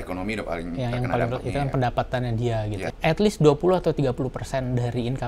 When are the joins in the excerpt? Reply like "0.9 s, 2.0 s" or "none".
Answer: 2.9 s